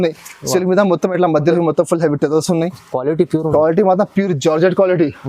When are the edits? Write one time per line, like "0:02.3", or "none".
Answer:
0:01.5